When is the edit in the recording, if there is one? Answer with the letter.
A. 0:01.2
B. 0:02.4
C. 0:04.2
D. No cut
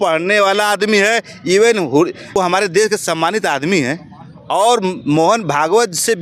B